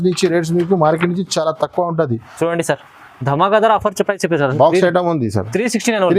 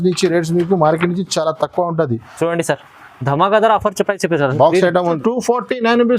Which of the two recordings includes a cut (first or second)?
second